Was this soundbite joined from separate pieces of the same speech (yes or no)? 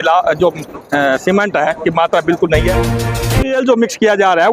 yes